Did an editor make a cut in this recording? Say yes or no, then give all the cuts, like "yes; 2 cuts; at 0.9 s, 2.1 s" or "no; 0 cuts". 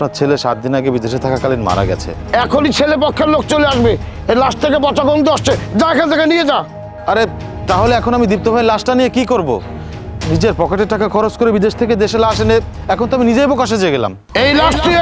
yes; 2 cuts; at 2.1 s, 6.9 s